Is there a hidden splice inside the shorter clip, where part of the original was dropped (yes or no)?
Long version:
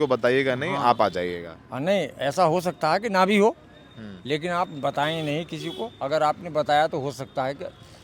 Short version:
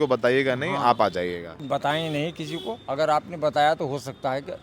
yes